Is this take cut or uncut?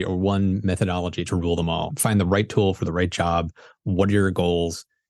cut